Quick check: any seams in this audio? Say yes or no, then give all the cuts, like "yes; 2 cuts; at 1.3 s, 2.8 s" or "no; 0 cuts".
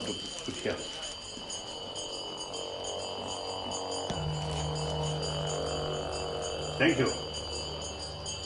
no; 0 cuts